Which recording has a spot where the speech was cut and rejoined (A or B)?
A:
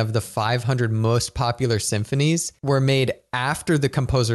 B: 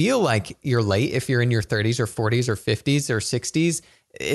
A